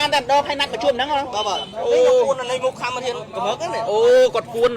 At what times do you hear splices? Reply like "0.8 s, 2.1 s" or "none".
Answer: none